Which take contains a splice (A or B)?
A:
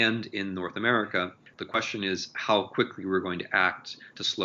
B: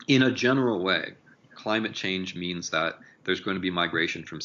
A